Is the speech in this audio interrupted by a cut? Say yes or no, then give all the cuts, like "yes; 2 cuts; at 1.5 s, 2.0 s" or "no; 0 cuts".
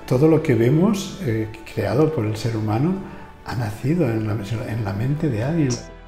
no; 0 cuts